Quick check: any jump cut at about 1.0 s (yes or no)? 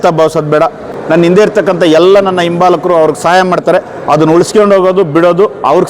yes